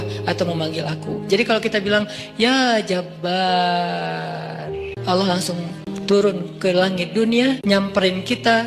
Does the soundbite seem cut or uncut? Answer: cut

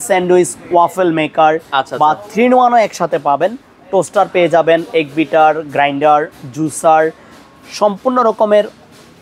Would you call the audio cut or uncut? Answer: uncut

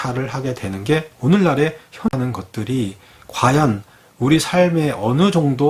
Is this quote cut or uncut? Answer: cut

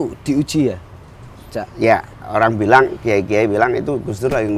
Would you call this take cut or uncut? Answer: uncut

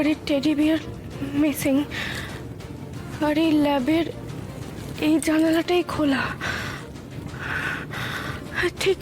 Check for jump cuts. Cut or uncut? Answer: uncut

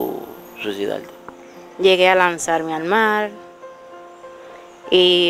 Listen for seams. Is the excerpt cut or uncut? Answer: uncut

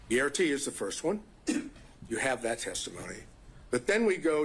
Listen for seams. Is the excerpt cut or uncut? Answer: uncut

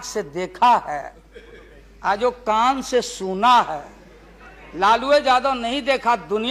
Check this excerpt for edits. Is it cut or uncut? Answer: uncut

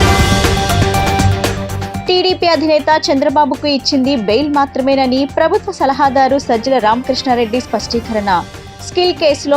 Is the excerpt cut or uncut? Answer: uncut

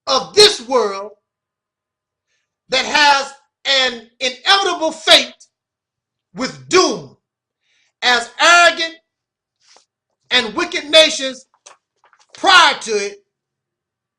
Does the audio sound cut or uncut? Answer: cut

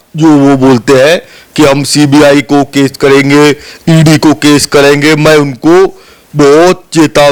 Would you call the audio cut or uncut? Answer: uncut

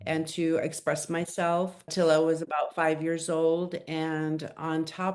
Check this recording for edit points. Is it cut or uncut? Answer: uncut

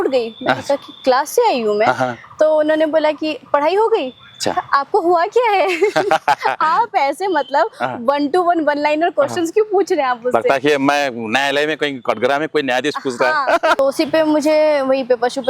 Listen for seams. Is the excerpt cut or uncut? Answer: cut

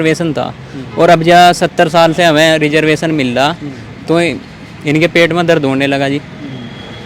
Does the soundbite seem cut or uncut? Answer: uncut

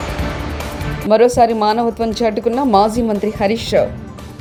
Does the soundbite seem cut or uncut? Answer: uncut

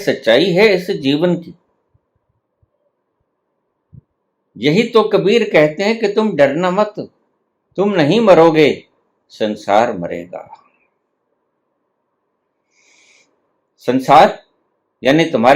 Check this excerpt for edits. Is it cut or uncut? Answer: cut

